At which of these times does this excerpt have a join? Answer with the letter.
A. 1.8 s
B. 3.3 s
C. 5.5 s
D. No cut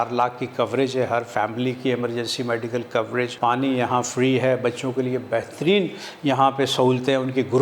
B